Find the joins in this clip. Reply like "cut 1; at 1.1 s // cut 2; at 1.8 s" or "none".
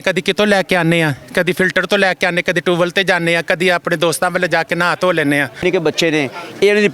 cut 1; at 5.6 s